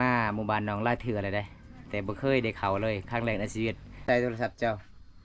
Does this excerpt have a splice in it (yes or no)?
yes